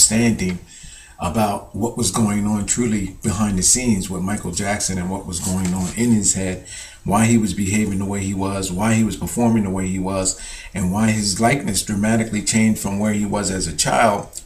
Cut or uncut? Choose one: cut